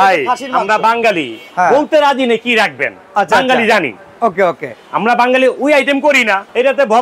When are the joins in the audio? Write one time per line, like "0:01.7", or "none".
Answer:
none